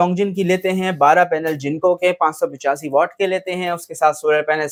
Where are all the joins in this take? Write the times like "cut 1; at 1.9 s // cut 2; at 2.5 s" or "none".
none